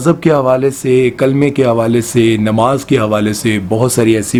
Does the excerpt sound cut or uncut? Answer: uncut